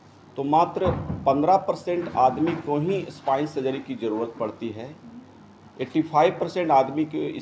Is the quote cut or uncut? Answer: uncut